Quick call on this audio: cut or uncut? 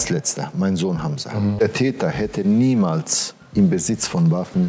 cut